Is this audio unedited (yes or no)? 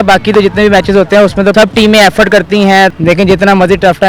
no